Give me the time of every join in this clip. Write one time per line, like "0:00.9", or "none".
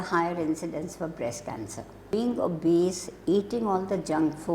0:02.0